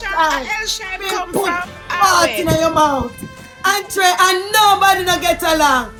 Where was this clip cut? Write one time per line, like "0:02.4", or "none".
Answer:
none

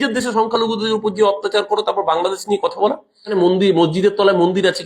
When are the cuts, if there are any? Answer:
0:03.3

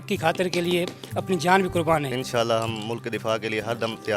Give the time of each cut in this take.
0:02.2

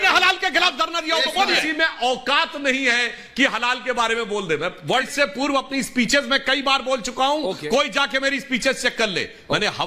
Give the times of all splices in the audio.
0:01.6
0:05.1

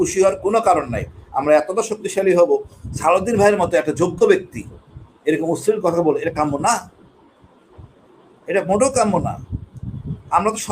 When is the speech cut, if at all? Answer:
0:02.9

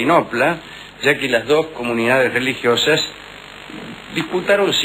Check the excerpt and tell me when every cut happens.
0:03.9

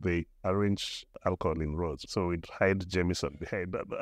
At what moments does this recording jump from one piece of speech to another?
0:01.2
0:02.0

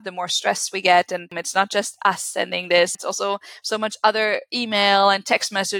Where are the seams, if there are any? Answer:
0:01.4
0:03.0

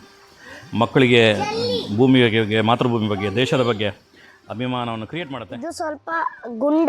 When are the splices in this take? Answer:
0:05.5

